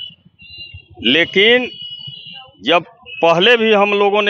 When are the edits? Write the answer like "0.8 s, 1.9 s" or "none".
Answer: none

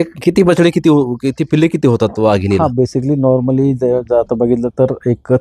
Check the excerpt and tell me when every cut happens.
none

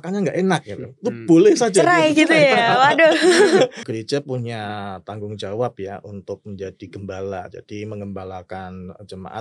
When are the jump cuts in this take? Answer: 3.8 s

